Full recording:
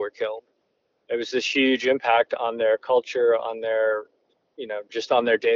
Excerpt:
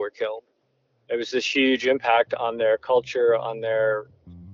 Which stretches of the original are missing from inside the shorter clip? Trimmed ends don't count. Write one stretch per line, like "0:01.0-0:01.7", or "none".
none